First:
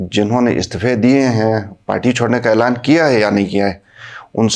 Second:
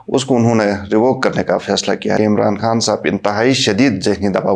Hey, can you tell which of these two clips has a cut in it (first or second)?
second